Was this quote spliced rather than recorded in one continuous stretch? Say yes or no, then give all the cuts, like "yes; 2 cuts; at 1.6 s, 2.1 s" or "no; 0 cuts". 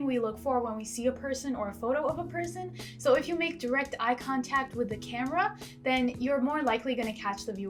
no; 0 cuts